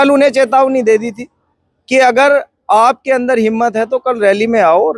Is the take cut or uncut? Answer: uncut